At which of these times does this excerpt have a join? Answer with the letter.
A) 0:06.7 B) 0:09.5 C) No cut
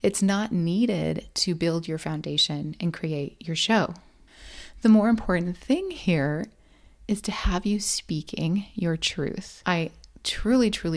B